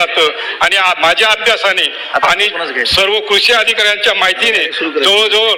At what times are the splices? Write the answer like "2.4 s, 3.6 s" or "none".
none